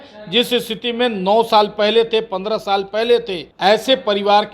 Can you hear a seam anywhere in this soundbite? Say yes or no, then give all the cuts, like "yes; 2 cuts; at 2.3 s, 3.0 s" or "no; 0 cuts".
yes; 1 cut; at 3.4 s